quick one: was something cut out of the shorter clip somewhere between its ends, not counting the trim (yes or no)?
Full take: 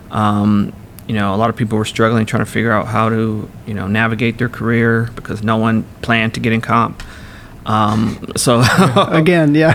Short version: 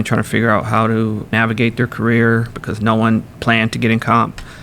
yes